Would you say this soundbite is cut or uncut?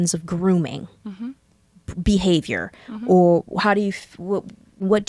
uncut